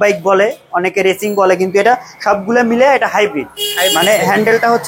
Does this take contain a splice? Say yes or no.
no